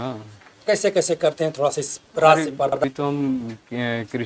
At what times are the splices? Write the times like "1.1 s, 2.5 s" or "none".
2.7 s

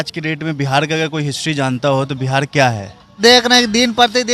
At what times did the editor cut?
3.2 s

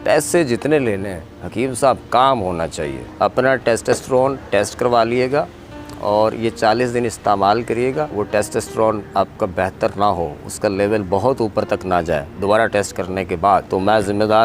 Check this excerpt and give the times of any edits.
3.0 s, 8.1 s, 13.7 s

